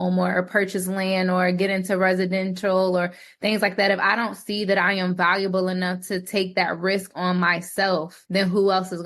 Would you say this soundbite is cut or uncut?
cut